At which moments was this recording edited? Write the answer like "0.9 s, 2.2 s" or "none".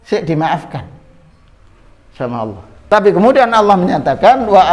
2.9 s